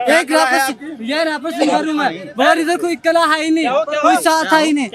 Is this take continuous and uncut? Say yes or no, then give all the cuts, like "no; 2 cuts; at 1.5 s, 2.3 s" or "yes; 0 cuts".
yes; 0 cuts